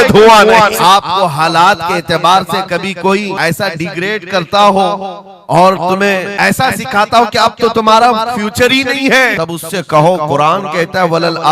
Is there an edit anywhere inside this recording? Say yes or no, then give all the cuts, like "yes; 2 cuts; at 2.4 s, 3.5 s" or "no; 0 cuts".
yes; 4 cuts; at 0.8 s, 3.3 s, 6.3 s, 9.3 s